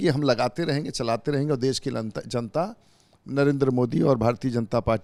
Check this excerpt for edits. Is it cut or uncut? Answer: uncut